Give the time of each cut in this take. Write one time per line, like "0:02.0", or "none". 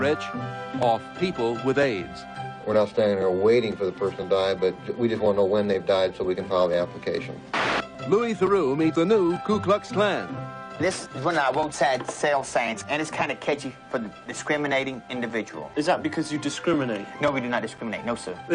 0:03.9